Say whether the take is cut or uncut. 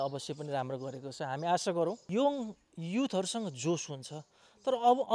cut